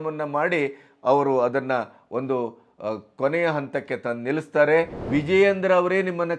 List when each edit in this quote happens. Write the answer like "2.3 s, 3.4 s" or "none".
5.0 s